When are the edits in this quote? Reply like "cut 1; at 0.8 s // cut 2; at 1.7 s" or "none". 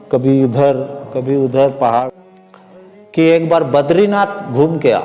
cut 1; at 2.1 s